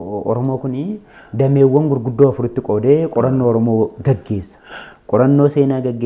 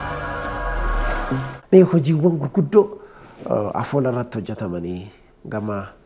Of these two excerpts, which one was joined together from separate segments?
second; 1 cut; at 1.4 s

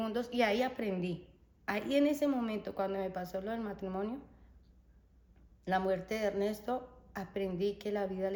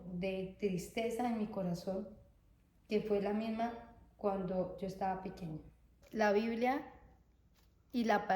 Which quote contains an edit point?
second; 1 cut; at 5.9 s

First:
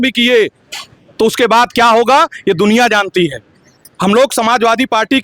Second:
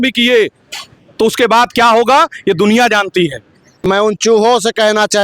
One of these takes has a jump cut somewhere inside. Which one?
second; 1 cut; at 3.7 s

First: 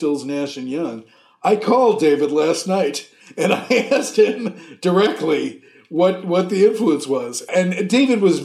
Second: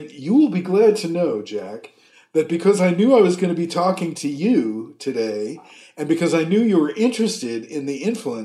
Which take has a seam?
first; 1 cut; at 7.5 s

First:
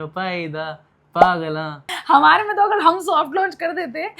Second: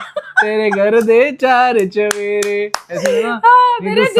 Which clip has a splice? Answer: first; 1 cut; at 1.9 s

